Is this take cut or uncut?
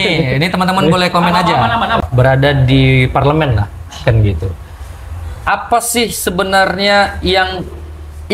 cut